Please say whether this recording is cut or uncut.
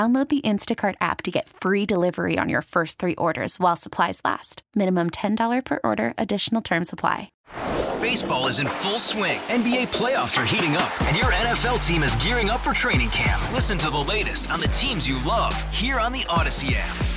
cut